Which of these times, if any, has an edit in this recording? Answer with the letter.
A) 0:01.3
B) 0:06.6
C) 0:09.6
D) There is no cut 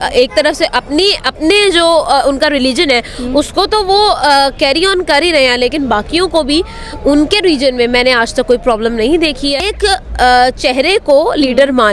C